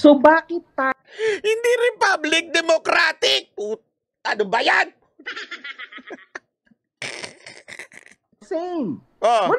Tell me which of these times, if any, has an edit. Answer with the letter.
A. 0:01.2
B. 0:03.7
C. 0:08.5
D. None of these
C